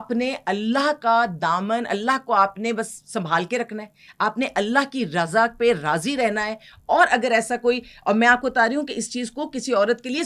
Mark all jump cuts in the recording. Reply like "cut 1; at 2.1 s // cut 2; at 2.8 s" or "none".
none

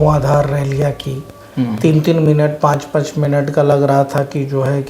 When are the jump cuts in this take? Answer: none

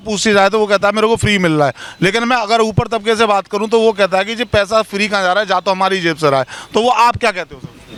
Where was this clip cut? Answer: none

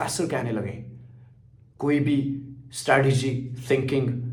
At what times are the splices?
none

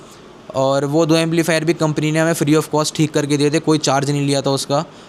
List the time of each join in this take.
none

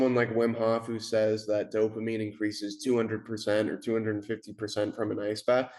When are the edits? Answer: none

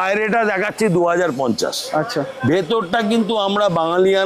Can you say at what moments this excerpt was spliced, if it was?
none

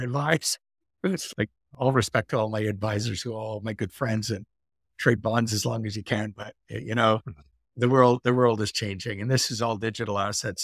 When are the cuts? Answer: cut 1; at 1.3 s

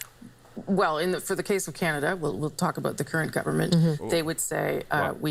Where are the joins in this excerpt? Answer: none

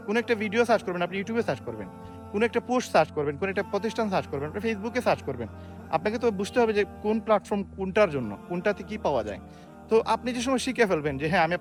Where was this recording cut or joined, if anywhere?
none

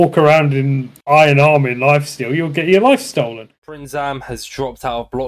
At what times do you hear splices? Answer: cut 1; at 3.5 s

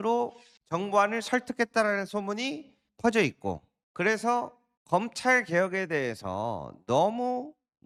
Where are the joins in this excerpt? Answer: none

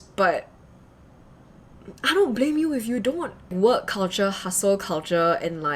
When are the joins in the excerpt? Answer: none

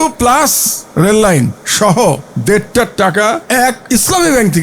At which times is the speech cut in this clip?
cut 1; at 1.6 s // cut 2; at 2.3 s // cut 3; at 3.6 s

